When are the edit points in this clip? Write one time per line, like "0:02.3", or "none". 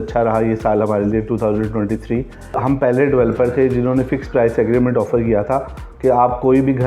0:02.6